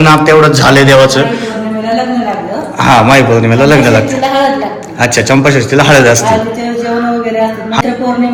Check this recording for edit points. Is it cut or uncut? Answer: uncut